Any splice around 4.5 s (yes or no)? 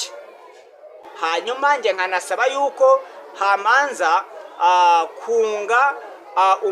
no